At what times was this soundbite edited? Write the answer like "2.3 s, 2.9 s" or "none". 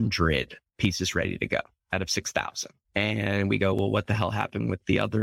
none

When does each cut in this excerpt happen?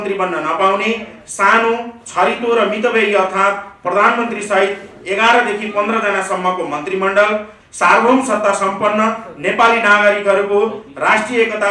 7.6 s

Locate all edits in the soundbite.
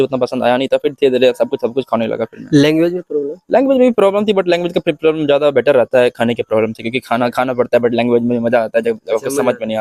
none

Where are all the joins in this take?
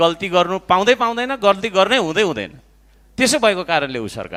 none

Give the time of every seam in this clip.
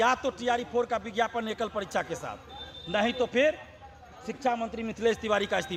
none

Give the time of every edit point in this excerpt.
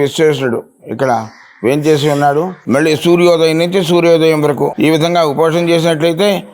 2.6 s, 4.7 s

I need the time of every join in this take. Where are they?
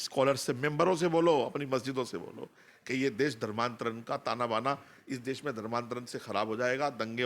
none

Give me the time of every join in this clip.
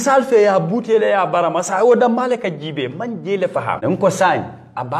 3.8 s

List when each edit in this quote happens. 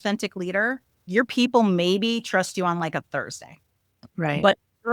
1.1 s

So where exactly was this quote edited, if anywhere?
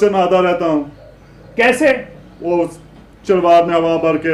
none

